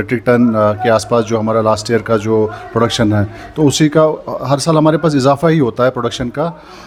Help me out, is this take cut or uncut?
uncut